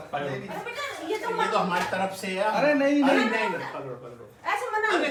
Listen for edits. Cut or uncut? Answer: uncut